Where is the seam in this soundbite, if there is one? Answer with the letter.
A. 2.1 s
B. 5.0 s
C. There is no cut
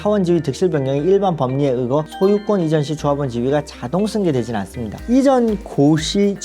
B